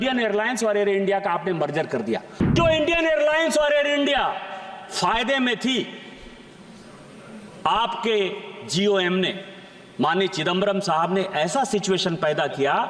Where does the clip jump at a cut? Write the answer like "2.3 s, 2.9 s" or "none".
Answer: 2.5 s